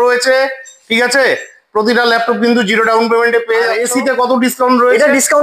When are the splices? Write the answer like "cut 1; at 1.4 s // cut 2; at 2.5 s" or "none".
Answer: cut 1; at 3.8 s